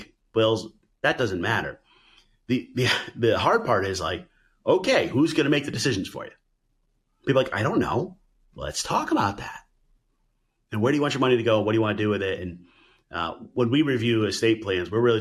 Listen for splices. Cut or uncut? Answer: uncut